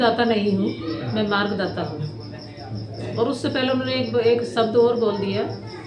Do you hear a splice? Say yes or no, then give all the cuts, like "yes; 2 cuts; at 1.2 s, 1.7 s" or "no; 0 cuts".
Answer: no; 0 cuts